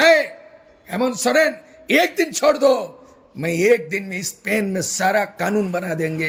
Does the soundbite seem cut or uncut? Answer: uncut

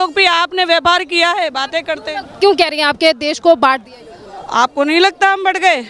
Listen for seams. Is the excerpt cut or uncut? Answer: uncut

